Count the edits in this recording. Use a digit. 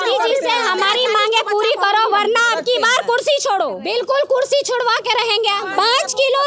2